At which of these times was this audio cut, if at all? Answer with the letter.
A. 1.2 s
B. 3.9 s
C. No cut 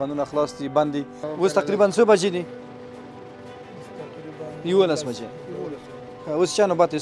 A